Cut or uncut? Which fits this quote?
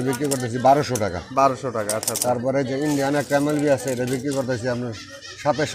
uncut